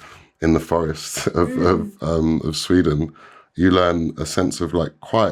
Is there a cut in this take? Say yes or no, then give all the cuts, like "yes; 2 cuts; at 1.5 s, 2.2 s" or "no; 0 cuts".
no; 0 cuts